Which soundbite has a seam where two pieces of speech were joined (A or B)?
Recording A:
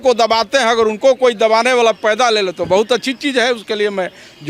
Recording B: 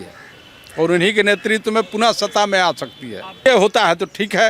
B